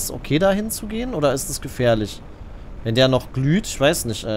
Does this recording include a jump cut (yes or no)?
no